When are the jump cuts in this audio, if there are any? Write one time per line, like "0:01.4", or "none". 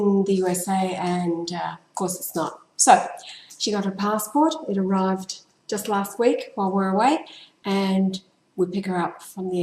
0:06.0